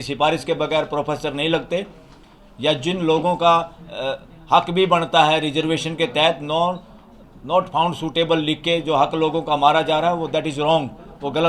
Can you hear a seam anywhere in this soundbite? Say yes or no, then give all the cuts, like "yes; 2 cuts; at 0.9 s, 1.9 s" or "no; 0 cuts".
no; 0 cuts